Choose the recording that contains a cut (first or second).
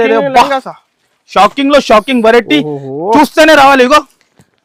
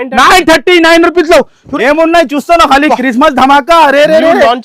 second